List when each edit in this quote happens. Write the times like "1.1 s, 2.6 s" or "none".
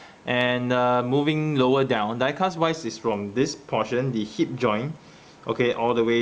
5.3 s